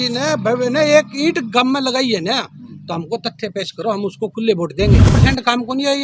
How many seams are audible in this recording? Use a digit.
1